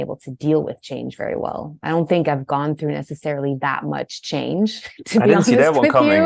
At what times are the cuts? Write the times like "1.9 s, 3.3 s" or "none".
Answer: none